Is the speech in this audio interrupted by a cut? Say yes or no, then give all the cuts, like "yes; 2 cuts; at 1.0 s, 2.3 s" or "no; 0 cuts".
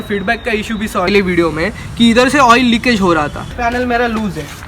yes; 2 cuts; at 1.1 s, 3.5 s